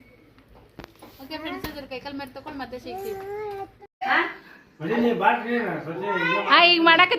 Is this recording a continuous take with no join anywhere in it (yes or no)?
no